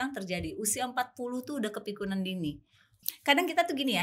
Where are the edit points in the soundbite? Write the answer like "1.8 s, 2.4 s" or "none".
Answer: 3.0 s